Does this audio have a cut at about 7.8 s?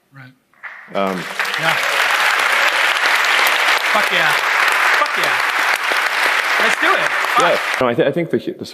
yes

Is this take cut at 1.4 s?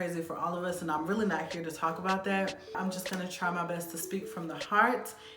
no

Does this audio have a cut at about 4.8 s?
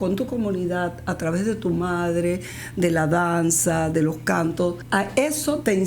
yes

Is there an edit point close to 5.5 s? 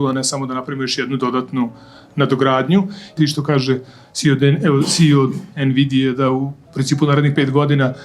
no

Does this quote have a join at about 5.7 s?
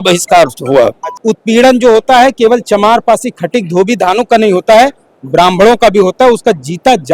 no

